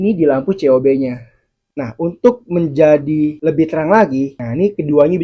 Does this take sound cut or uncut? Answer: cut